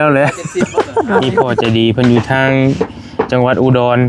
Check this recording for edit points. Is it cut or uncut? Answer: cut